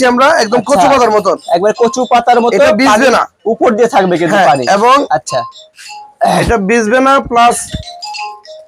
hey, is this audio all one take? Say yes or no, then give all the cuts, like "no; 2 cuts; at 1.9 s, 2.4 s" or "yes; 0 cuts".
yes; 0 cuts